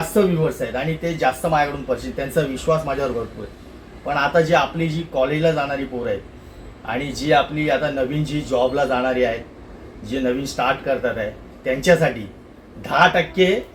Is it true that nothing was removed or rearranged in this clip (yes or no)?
yes